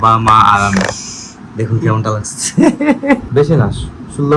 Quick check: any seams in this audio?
yes; 1 cut; at 3.3 s

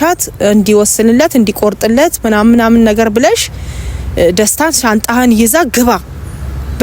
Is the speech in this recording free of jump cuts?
yes; 0 cuts

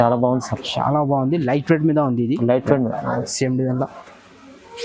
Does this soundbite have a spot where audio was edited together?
yes; 1 cut; at 3.0 s

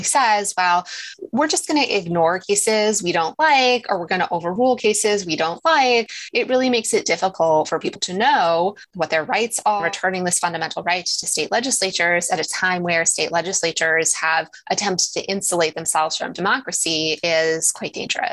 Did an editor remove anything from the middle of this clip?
yes; 2 cuts; at 6.1 s, 9.8 s

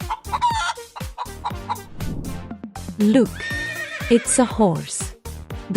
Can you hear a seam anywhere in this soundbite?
yes; 1 cut; at 1.4 s

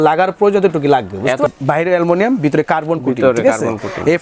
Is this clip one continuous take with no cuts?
no; 1 cut; at 1.5 s

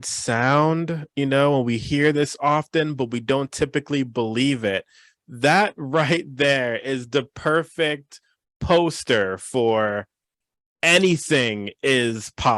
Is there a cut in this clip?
no; 0 cuts

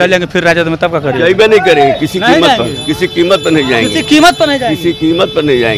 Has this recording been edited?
no; 0 cuts

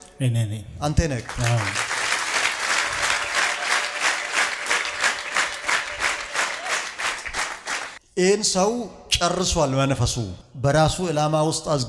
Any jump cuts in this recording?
no; 0 cuts

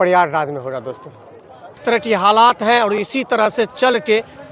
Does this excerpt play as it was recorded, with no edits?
no; 1 cut; at 1.8 s

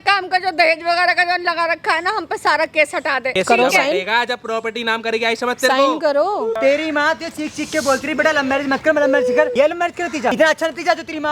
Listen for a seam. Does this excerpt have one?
yes; 3 cuts; at 3.3 s, 6.6 s, 9.7 s

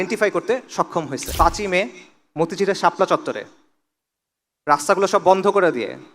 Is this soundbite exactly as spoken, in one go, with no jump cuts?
no; 1 cut; at 1.3 s

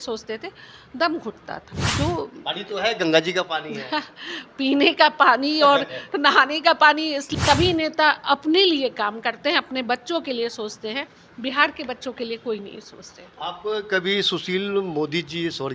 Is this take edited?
yes; 2 cuts; at 1.7 s, 7.3 s

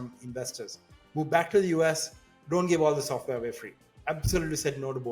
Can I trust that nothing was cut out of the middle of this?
no; 1 cut; at 3.9 s

